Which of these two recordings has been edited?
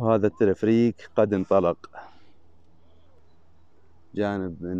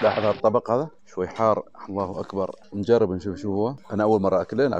second; 3 cuts; at 1.0 s, 2.6 s, 3.8 s

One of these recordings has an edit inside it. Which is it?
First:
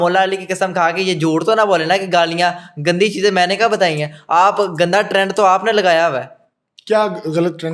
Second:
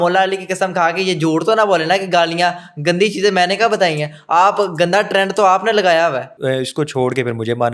second; 1 cut; at 6.3 s

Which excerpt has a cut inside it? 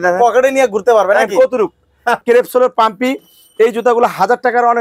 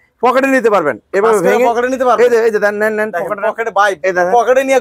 first; 1 cut; at 2.2 s

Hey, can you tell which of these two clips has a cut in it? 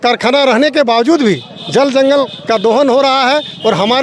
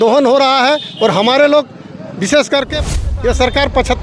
second; 1 cut; at 2.9 s

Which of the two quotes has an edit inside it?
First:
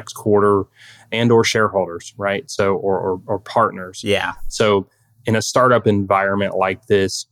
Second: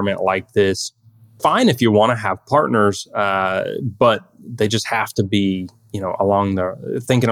first; 1 cut; at 4.4 s

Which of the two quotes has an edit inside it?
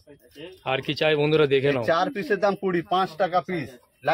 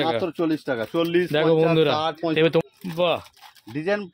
second; 1 cut; at 2.6 s

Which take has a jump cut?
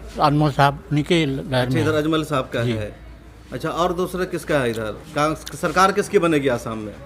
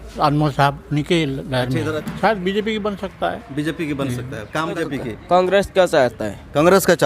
second; 2 cuts; at 2.0 s, 4.8 s

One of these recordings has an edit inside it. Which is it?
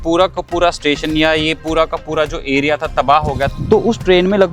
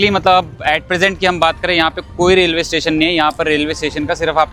first; 1 cut; at 3.5 s

